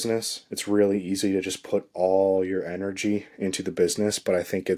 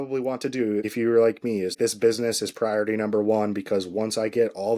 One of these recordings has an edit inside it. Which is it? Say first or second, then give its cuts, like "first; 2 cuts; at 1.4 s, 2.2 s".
second; 2 cuts; at 0.9 s, 1.8 s